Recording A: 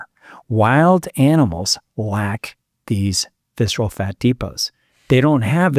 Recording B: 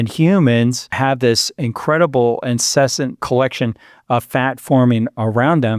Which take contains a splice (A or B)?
B